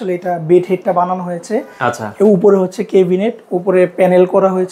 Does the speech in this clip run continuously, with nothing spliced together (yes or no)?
yes